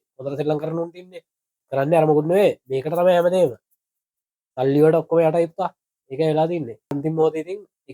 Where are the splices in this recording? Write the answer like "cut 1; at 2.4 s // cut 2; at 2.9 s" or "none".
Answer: cut 1; at 1.6 s // cut 2; at 6.9 s